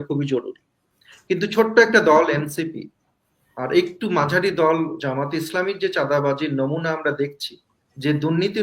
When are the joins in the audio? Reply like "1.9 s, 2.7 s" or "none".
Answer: none